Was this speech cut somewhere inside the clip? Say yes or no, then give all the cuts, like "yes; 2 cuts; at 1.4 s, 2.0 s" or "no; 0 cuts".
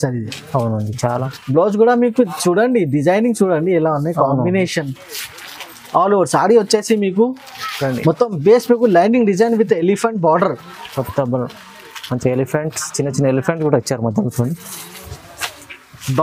yes; 2 cuts; at 1.2 s, 15.1 s